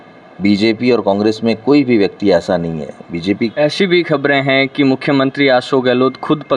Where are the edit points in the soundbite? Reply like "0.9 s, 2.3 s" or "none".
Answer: 3.5 s